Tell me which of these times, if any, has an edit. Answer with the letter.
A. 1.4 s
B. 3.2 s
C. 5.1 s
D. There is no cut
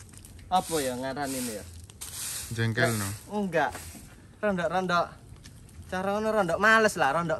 D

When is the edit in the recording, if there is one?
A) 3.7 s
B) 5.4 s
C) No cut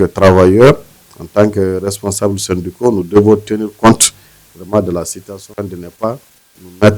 B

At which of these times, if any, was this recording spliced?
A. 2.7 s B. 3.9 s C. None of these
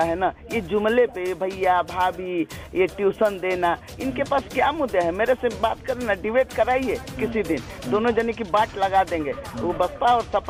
C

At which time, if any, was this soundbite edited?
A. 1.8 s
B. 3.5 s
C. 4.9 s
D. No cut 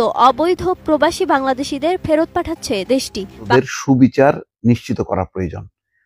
B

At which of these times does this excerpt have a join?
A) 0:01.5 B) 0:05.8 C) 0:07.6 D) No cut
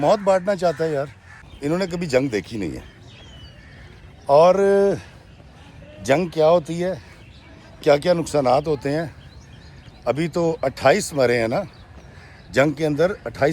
A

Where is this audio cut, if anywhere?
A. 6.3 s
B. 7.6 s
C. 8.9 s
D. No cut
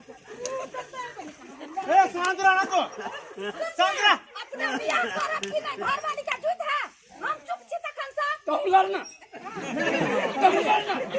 D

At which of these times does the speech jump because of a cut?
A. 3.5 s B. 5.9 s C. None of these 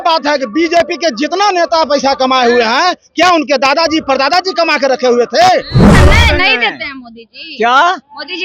B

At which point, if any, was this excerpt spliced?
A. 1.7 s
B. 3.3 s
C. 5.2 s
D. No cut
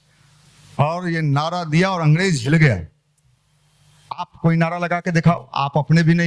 D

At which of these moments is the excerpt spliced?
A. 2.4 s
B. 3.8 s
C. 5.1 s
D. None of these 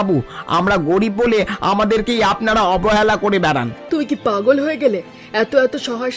B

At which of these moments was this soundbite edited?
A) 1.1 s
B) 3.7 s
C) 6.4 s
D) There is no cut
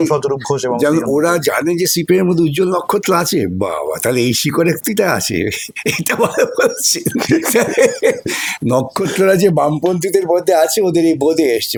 D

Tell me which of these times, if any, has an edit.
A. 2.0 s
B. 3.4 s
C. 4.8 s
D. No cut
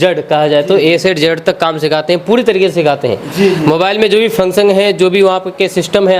D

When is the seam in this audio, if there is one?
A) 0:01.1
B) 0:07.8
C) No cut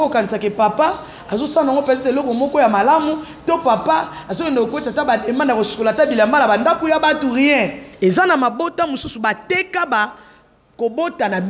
B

